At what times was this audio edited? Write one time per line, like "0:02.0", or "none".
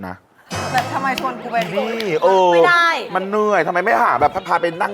none